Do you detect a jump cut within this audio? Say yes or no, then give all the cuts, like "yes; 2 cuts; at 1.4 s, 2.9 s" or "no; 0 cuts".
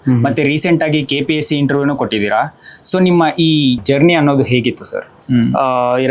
yes; 2 cuts; at 3.8 s, 5.1 s